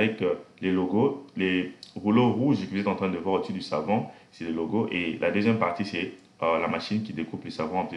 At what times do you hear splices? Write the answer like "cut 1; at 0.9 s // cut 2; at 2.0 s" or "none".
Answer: none